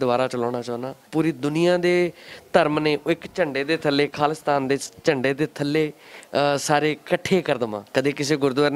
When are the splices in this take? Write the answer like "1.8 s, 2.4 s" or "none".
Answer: 1.0 s, 7.8 s